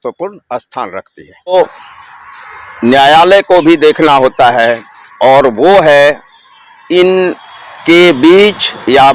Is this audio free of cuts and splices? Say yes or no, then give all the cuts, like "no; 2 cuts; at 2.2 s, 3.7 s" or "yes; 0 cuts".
no; 1 cut; at 1.5 s